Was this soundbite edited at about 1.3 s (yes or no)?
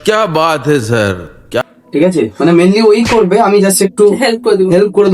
yes